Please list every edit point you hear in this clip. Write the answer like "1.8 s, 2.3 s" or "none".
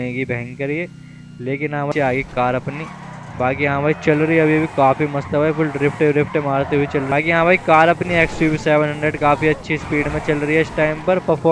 1.9 s, 7.1 s

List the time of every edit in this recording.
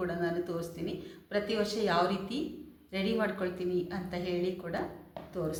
none

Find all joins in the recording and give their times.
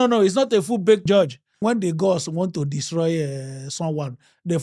1.1 s

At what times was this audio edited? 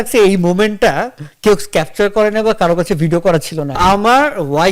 3.8 s

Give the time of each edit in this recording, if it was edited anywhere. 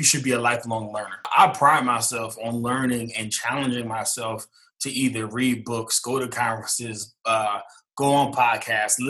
1.3 s

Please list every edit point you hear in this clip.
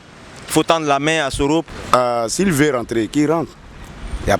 1.7 s

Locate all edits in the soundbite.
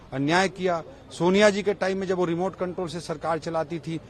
none

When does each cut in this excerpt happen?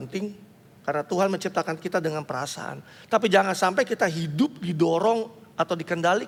none

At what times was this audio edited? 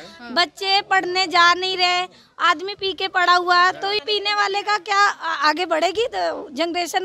none

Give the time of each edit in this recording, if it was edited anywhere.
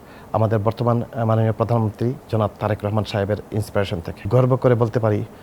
4.2 s

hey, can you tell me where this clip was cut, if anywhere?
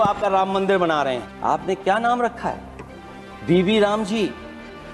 1.3 s

